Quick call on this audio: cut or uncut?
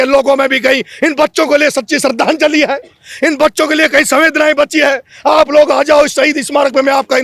uncut